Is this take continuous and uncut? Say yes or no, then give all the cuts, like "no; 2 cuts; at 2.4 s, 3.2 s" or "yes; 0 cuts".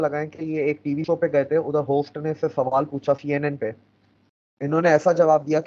yes; 0 cuts